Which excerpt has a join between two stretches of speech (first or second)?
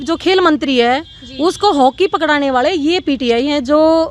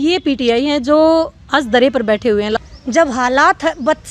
second